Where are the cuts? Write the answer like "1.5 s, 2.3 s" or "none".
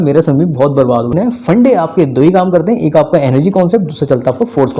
1.1 s